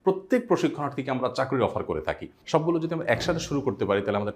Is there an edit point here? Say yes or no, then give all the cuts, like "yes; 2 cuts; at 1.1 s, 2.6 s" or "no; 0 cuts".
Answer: yes; 1 cut; at 2.3 s